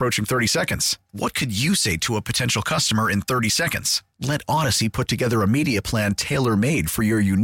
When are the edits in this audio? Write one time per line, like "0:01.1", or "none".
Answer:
none